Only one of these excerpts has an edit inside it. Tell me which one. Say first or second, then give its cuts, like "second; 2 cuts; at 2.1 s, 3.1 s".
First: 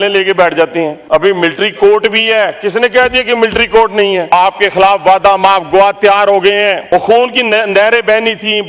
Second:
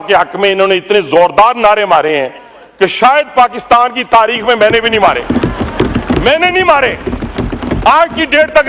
first; 3 cuts; at 1.0 s, 4.3 s, 6.8 s